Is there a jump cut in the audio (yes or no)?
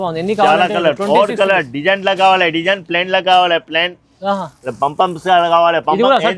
no